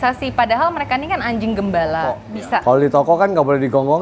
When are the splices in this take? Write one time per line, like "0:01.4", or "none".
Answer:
0:02.2